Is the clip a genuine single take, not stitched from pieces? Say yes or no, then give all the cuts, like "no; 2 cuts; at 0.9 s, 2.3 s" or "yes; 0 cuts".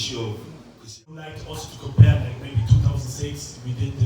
no; 1 cut; at 1.2 s